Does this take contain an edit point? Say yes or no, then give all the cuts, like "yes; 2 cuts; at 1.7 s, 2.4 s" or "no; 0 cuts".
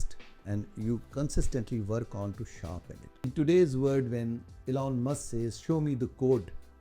yes; 1 cut; at 3.3 s